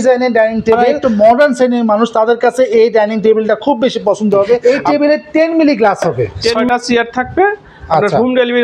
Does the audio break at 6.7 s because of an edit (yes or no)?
yes